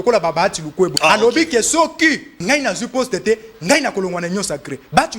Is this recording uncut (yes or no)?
no